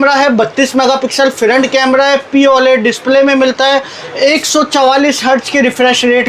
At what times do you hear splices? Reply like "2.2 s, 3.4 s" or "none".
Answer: none